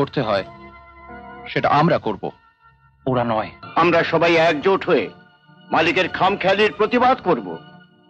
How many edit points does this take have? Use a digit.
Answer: 1